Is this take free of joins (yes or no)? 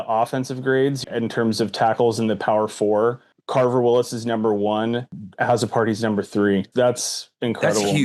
no